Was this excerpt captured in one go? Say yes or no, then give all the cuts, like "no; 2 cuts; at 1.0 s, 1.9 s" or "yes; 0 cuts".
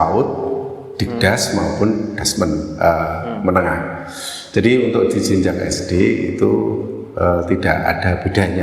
yes; 0 cuts